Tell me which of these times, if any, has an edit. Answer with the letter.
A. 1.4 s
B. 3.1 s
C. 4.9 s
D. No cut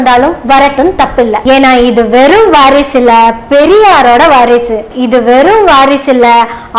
A